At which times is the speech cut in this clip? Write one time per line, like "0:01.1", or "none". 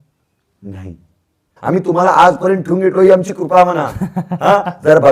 0:01.5